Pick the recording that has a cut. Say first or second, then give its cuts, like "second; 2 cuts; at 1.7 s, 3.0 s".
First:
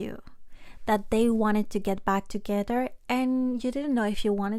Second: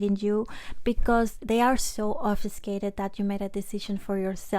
second; 1 cut; at 1.4 s